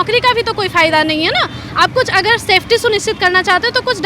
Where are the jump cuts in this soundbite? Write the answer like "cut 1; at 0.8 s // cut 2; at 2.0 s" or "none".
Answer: none